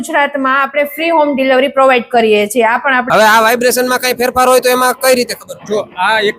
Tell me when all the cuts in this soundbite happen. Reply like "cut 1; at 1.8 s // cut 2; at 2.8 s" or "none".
cut 1; at 3.0 s